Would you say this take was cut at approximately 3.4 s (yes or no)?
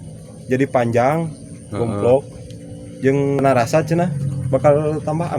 yes